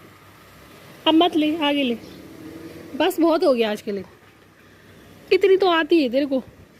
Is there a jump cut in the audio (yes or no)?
no